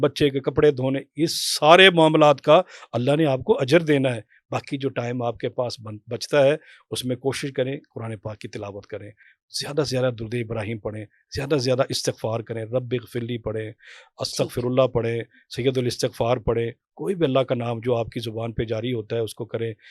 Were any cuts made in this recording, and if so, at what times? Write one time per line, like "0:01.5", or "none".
none